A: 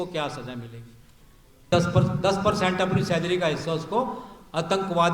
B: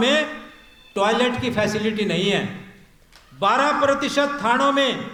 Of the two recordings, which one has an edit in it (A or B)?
A